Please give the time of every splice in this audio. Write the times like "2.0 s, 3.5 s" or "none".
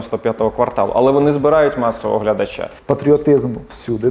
2.7 s